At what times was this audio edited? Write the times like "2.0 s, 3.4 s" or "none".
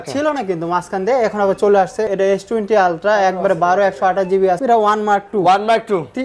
2.1 s, 4.6 s